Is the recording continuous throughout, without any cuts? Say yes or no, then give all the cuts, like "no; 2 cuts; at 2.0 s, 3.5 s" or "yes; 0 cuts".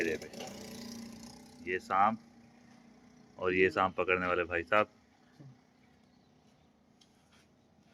yes; 0 cuts